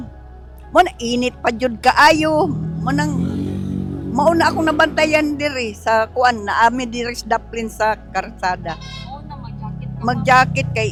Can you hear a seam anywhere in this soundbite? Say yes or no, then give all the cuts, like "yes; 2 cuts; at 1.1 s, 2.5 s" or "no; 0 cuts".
no; 0 cuts